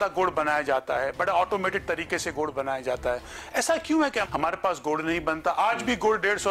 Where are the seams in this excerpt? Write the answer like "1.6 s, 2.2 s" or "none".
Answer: 4.2 s